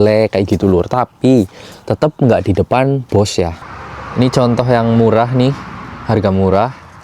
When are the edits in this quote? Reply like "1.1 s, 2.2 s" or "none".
3.6 s